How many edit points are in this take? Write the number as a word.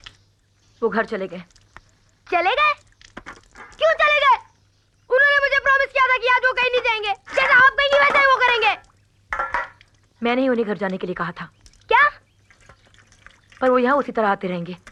zero